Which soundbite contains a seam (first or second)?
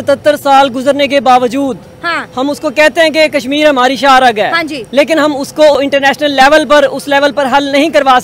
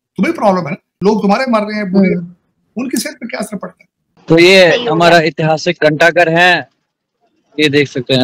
second